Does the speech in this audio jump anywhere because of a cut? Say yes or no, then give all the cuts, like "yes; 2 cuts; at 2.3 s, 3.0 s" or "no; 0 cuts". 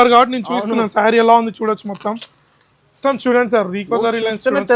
no; 0 cuts